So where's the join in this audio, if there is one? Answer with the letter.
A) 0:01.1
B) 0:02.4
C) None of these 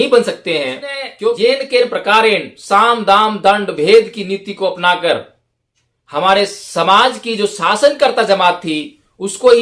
A